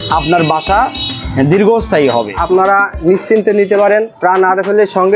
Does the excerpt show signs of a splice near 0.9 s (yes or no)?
no